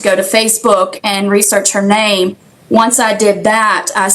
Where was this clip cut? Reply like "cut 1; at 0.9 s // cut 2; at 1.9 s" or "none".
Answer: none